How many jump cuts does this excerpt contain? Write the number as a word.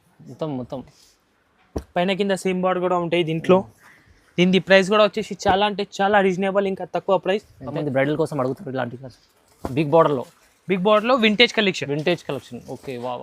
one